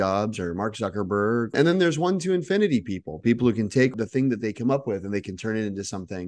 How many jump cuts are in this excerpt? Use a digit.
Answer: 1